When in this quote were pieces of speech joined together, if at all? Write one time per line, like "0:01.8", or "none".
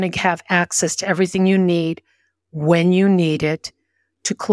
none